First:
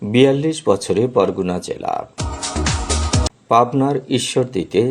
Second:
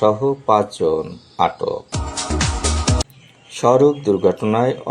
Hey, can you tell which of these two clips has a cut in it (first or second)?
second